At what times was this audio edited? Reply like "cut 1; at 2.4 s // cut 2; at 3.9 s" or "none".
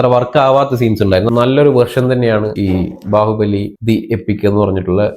cut 1; at 1.3 s

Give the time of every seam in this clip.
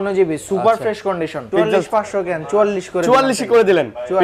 cut 1; at 1.5 s

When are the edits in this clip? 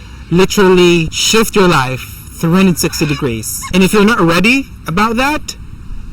cut 1; at 1.2 s // cut 2; at 3.5 s

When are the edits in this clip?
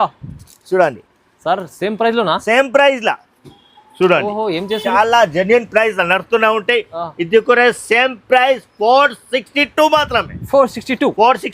cut 1; at 4.9 s

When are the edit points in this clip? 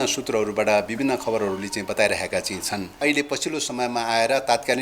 cut 1; at 3.0 s

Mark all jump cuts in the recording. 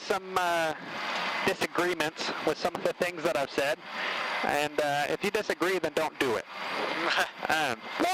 none

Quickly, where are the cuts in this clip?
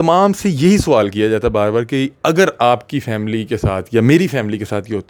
none

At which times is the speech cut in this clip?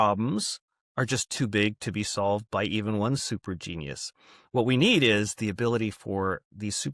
none

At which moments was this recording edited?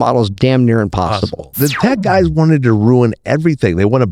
cut 1; at 1.5 s

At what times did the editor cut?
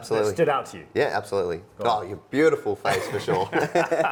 none

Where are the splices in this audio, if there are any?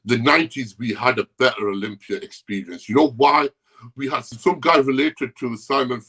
cut 1; at 4.2 s

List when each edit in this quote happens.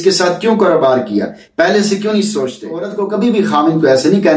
cut 1; at 2.9 s

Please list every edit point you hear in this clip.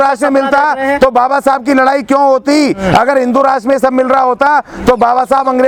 none

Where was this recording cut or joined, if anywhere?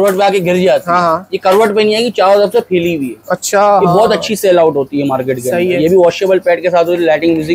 none

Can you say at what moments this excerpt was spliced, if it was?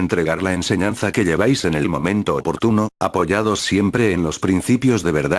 cut 1; at 3.2 s

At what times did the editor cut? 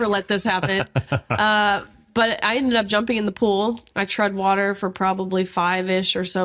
none

